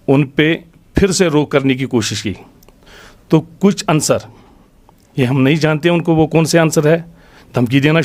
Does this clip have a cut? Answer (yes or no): no